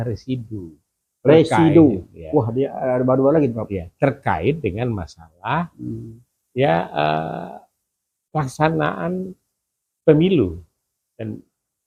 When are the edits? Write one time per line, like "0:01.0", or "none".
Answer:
none